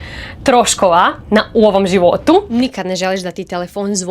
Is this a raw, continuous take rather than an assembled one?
no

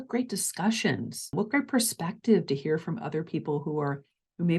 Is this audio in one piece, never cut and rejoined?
no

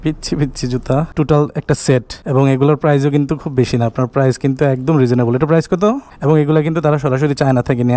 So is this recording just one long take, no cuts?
no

